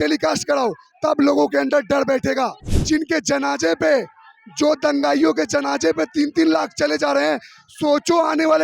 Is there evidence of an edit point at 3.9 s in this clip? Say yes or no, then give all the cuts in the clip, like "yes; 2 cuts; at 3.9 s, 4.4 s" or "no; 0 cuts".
no; 1 cut; at 2.7 s